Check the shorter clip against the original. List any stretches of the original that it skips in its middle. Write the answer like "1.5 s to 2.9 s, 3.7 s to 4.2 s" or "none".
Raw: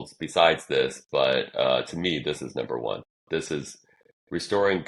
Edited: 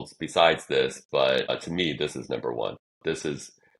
1.5 s to 1.8 s

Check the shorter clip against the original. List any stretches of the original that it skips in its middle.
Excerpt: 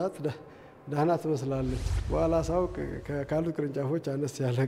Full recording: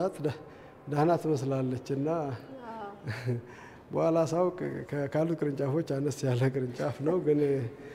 1.8 s to 3.6 s

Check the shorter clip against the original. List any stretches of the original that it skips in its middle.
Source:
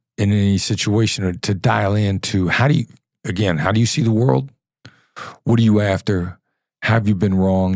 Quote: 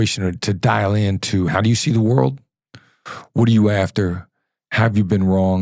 2.5 s to 3.6 s

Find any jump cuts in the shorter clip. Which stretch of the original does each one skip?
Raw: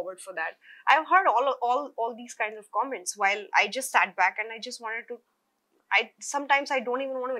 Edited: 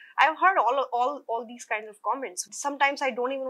3.1 s to 6.1 s

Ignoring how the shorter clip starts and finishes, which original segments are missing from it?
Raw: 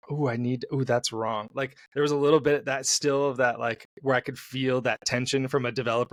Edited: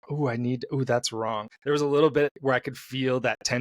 1.5 s to 1.8 s, 2.6 s to 4.0 s

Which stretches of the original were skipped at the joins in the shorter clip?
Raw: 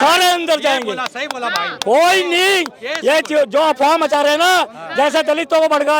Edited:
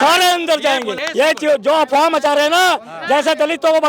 1.0 s to 2.8 s

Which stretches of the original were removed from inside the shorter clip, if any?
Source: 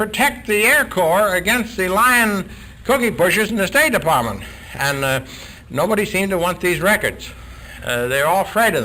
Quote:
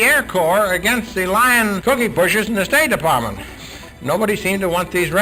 2.4 s to 2.8 s, 4.7 s to 5.3 s

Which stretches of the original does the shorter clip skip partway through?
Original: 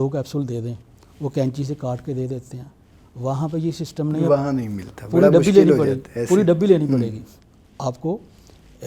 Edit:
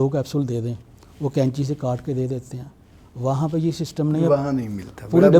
none

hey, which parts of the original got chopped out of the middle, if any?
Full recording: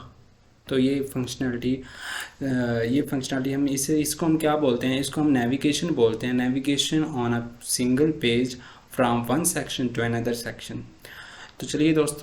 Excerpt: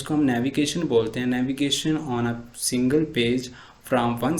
none

